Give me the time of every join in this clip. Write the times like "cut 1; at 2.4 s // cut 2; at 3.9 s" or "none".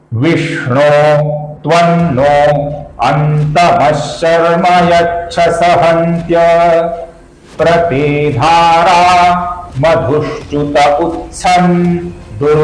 none